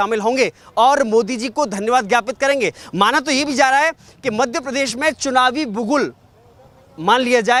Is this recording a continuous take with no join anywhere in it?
yes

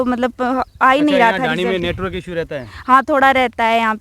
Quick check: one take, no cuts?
yes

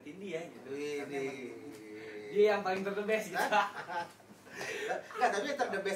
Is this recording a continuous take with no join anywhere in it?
yes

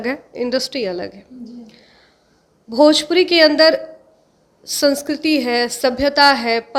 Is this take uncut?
yes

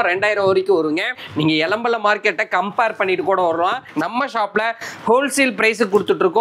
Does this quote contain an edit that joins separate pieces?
yes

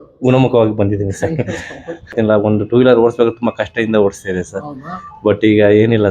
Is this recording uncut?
no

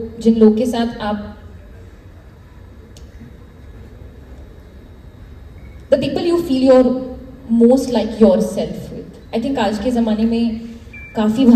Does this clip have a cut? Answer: no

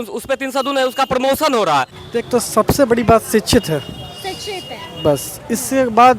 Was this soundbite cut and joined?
yes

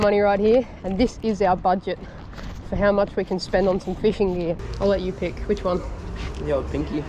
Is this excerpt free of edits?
no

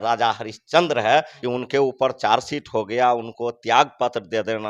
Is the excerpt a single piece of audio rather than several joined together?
no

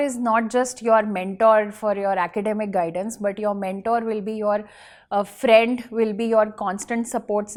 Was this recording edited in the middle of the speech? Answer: no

